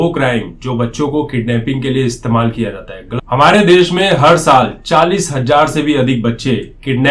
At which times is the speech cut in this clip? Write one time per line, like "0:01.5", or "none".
0:03.0